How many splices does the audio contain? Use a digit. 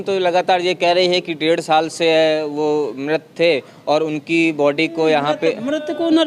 0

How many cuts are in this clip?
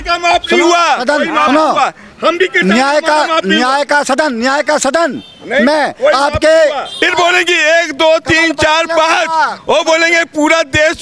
1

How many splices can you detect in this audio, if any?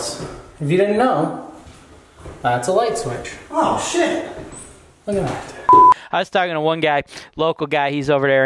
1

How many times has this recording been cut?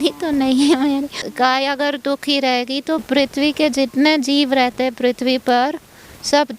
2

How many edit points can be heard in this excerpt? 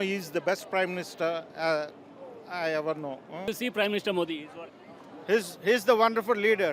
1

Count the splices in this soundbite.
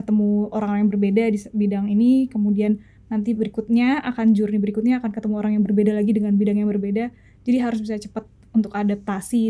0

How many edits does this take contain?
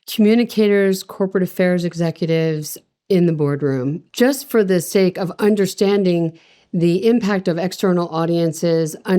1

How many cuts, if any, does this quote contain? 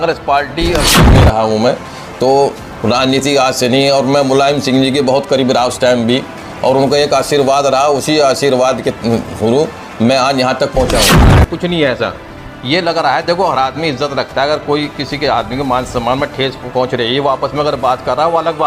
2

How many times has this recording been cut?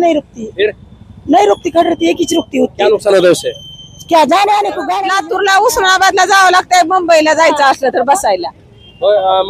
1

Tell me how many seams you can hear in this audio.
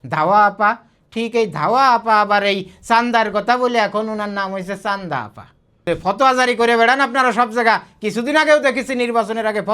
1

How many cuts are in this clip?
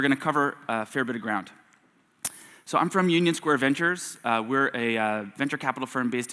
1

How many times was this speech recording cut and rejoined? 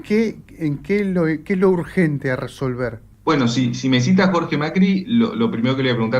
1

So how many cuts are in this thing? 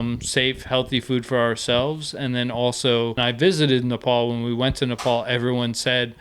1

